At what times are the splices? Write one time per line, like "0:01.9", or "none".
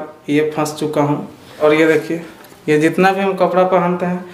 0:01.6